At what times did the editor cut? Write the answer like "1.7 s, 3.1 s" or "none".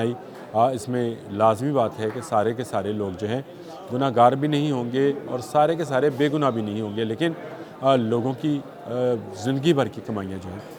none